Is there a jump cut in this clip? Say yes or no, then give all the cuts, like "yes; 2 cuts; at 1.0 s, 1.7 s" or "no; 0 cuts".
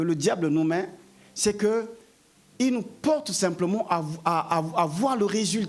no; 0 cuts